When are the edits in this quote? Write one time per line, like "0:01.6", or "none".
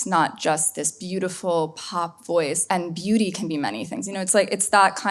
0:02.6